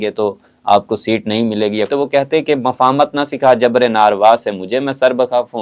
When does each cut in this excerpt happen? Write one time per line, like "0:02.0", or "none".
0:01.9